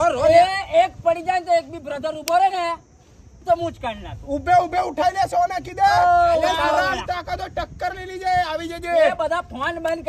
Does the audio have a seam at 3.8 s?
no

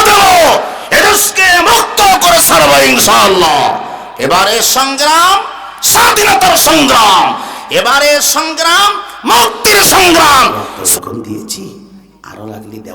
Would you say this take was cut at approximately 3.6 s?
no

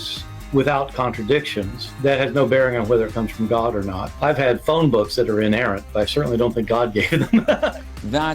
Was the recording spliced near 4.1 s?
no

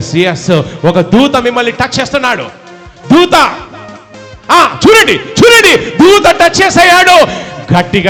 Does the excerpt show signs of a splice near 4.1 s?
no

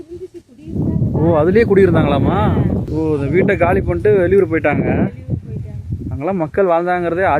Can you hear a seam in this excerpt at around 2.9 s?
yes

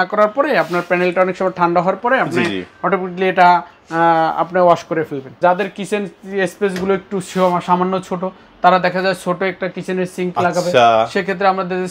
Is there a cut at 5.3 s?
yes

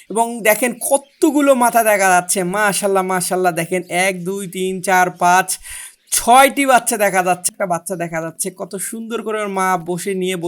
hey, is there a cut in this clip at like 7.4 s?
yes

